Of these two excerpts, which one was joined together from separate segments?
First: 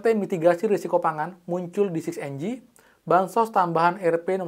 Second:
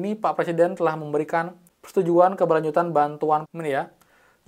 second; 1 cut; at 3.5 s

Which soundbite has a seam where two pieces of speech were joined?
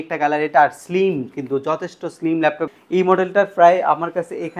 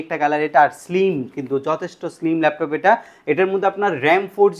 first; 1 cut; at 2.7 s

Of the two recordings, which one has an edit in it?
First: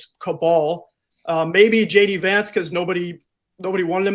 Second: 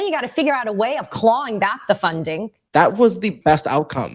second; 2 cuts; at 2.5 s, 3.4 s

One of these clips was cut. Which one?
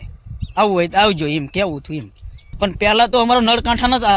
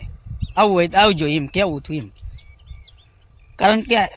first; 1 cut; at 2.4 s

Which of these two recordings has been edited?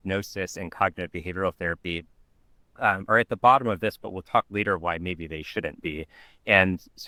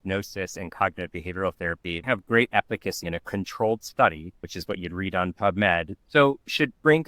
second; 4 cuts; at 2.1 s, 3.0 s, 4.5 s, 5.9 s

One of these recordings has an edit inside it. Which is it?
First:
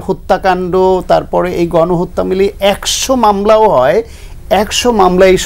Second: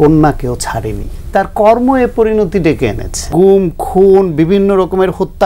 second; 2 cuts; at 1.3 s, 3.3 s

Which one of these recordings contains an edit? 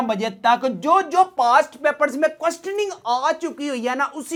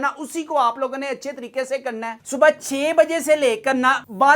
second; 1 cut; at 2.2 s

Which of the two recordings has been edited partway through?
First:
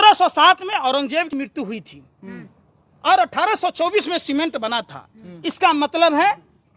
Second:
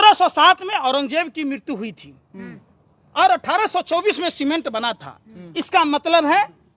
first; 1 cut; at 1.3 s

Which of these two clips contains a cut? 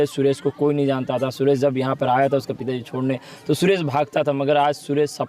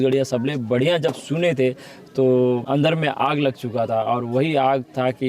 second; 1 cut; at 2.6 s

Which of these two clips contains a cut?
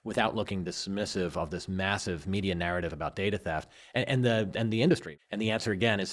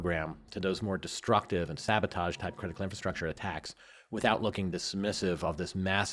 first; 1 cut; at 5.1 s

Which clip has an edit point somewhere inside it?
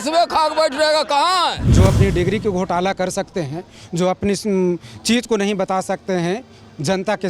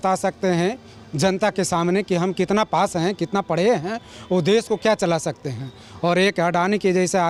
first; 1 cut; at 1.6 s

